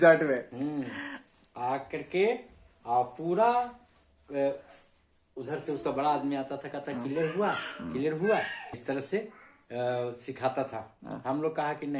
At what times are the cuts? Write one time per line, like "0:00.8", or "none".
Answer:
none